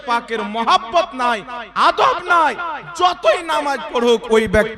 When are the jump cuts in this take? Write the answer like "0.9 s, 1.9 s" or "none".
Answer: none